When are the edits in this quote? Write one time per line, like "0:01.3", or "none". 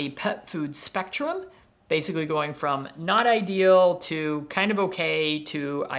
none